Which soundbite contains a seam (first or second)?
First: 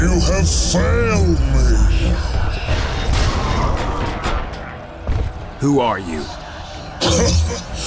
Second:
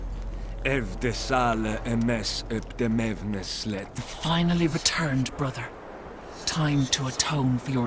second